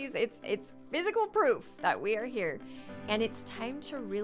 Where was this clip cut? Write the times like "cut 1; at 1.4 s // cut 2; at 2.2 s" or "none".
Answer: none